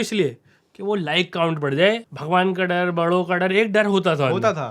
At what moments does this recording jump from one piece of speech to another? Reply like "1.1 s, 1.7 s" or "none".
2.1 s